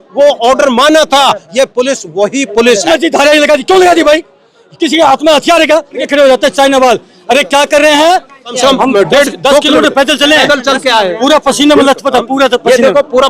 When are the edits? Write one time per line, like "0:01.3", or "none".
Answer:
0:02.9
0:06.0
0:08.5